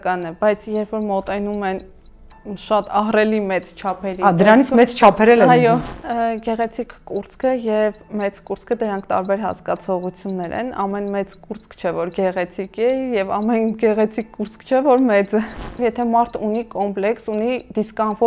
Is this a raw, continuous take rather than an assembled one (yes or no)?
no